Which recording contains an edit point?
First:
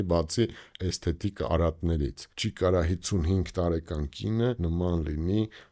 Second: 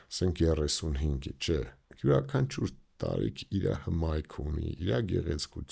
first; 2 cuts; at 2.3 s, 4.6 s

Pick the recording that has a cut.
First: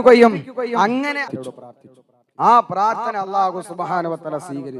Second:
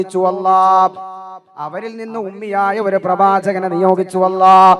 first; 1 cut; at 1.3 s

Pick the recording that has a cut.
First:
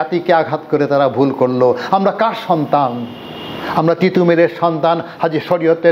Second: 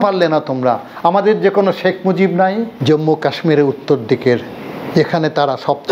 second; 1 cut; at 2.7 s

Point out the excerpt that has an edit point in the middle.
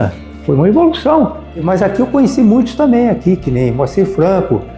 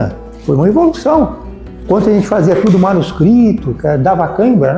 first; 1 cut; at 1.6 s

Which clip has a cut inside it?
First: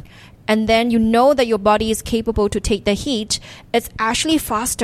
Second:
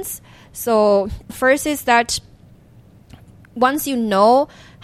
second; 1 cut; at 1.3 s

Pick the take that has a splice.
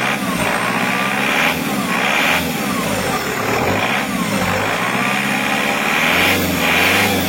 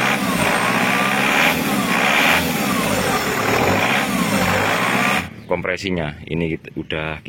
second; 1 cut; at 5.2 s

